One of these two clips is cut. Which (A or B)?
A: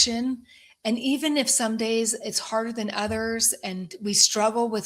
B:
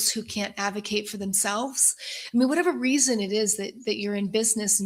A